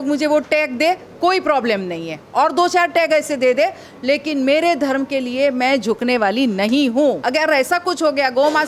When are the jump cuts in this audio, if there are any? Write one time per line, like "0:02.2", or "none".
0:07.2